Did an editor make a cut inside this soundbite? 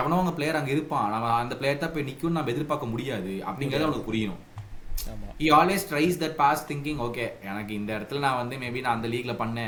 no; 0 cuts

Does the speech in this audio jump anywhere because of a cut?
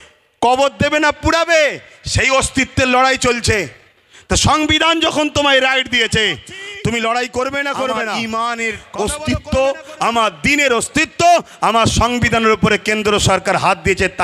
yes; 1 cut; at 8.2 s

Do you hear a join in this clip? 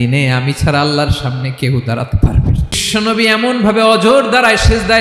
yes; 1 cut; at 2.7 s

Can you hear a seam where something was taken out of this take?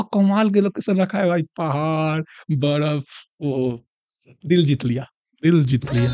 no; 0 cuts

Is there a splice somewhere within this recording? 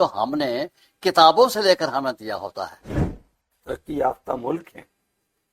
yes; 1 cut; at 3.0 s

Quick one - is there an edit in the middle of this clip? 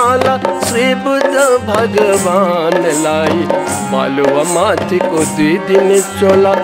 no; 0 cuts

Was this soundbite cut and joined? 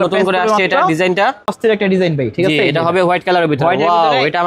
yes; 1 cut; at 1.5 s

